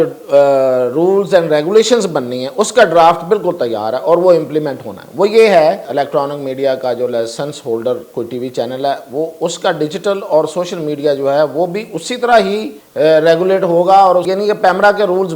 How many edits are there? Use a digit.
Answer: 3